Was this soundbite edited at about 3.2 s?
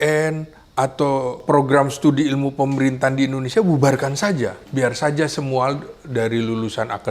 no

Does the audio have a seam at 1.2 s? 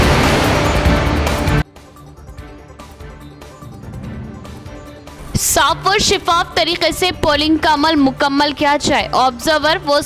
yes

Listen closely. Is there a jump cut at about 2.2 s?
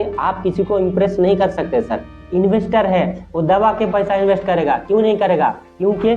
yes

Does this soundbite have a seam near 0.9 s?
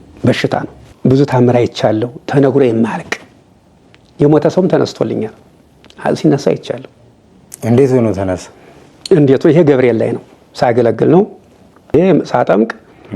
yes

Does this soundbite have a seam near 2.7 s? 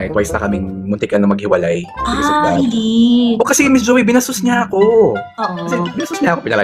no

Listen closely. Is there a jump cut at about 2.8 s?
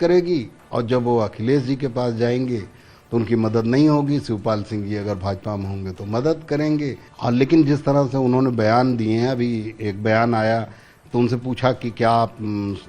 no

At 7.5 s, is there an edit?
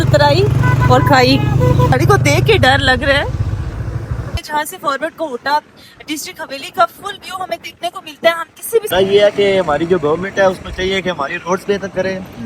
no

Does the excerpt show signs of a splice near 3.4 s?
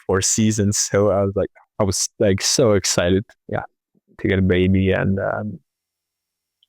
yes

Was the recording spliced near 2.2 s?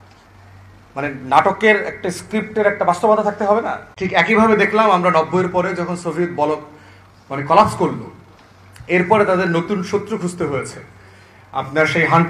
no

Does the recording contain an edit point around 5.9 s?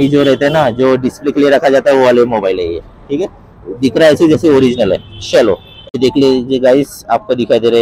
yes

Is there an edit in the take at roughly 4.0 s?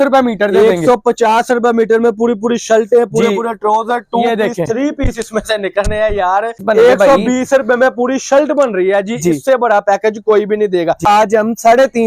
no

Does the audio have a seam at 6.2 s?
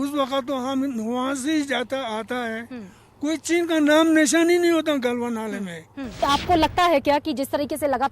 yes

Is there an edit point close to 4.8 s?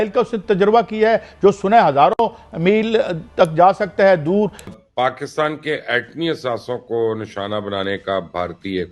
yes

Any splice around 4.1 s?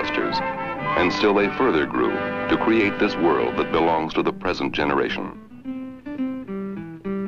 yes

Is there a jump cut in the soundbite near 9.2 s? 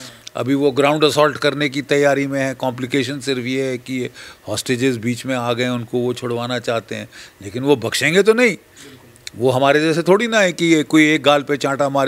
no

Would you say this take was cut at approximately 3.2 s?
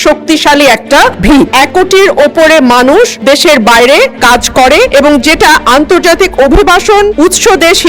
yes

